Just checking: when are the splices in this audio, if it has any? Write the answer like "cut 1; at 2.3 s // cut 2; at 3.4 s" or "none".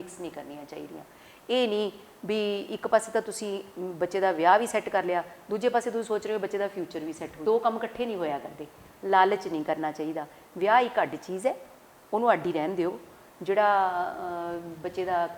cut 1; at 7.3 s

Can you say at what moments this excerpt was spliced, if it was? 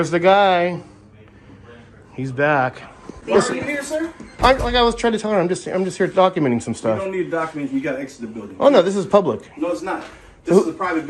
none

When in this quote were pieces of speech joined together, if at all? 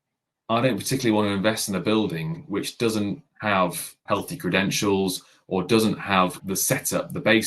cut 1; at 3.3 s // cut 2; at 4.0 s // cut 3; at 6.4 s

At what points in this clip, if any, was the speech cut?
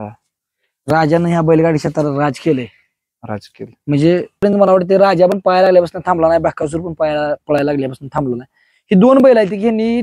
cut 1; at 4.4 s

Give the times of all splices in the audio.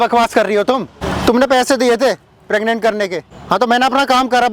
cut 1; at 1.0 s // cut 2; at 3.3 s

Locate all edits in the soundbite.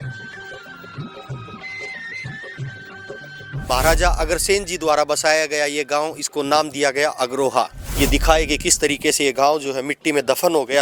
cut 1; at 3.6 s // cut 2; at 7.8 s

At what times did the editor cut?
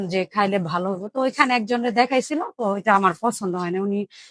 none

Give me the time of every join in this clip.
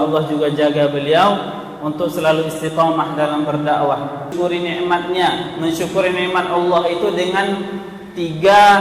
cut 1; at 4.3 s

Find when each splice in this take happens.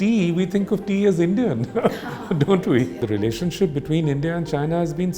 cut 1; at 3.0 s

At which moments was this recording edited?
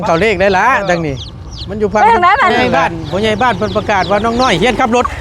cut 1; at 2.6 s

